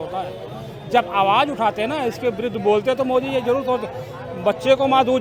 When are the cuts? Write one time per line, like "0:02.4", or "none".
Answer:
none